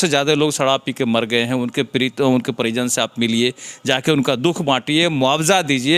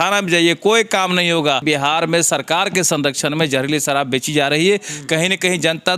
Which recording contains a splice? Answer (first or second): second